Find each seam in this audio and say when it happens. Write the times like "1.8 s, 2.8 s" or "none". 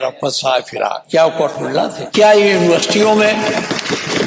1.0 s, 2.0 s